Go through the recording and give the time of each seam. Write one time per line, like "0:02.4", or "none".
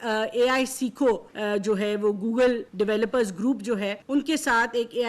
0:01.3
0:02.7
0:04.0